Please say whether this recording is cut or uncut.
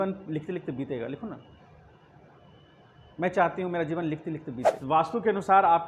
cut